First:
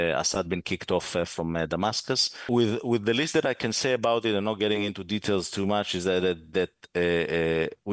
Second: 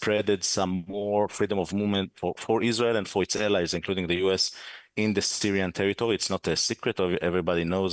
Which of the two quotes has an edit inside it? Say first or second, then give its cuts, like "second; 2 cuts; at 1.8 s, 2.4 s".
first; 1 cut; at 2.4 s